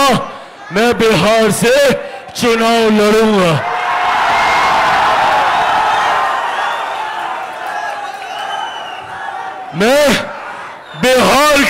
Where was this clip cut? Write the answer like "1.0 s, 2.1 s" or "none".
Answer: none